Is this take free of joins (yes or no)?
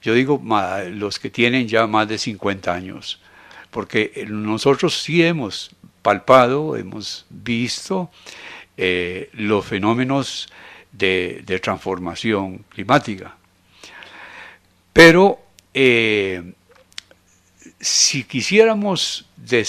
yes